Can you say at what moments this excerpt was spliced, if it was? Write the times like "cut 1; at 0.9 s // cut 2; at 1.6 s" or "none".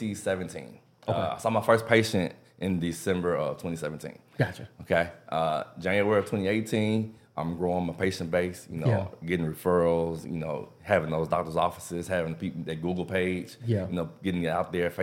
none